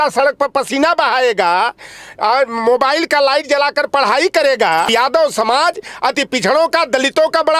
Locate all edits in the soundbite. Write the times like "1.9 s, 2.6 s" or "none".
4.9 s